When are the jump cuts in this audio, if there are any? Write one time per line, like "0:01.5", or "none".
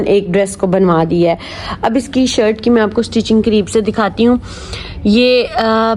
none